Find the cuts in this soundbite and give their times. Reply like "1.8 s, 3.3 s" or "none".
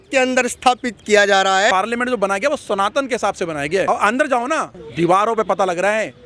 1.7 s, 3.9 s, 4.7 s